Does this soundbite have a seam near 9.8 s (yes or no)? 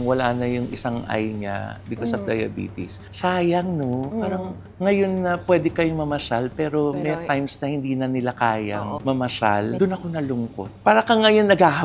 yes